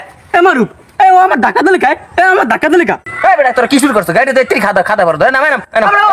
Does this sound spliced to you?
yes; 1 cut; at 3.1 s

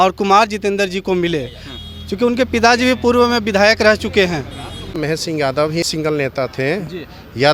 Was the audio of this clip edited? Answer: yes; 2 cuts; at 4.9 s, 5.9 s

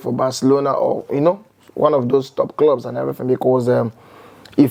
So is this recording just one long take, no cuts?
yes; 0 cuts

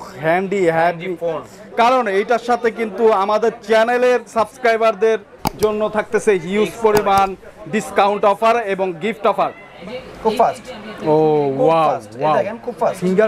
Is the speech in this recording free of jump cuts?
no; 2 cuts; at 1.6 s, 9.7 s

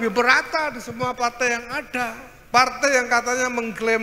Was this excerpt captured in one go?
no; 1 cut; at 2.3 s

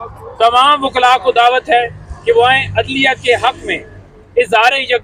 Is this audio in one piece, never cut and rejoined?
yes; 0 cuts

